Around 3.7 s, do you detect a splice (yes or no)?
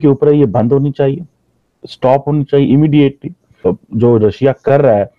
yes